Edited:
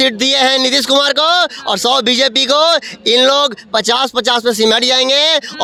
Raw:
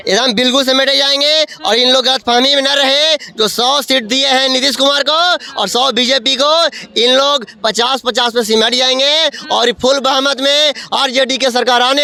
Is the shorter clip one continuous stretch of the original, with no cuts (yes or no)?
yes